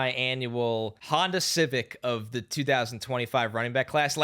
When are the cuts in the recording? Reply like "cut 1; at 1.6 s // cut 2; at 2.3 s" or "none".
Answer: cut 1; at 1.0 s